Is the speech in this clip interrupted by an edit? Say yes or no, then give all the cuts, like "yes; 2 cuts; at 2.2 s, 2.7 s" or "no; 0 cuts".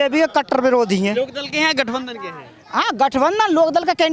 no; 0 cuts